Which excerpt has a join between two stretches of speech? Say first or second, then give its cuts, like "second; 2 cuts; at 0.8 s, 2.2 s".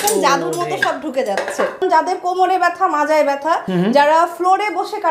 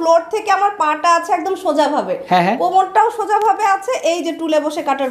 first; 2 cuts; at 1.8 s, 3.7 s